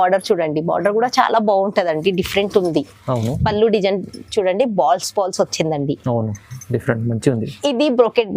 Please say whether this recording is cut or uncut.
uncut